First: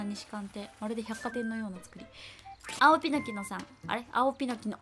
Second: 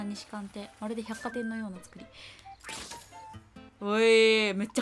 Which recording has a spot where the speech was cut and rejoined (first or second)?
first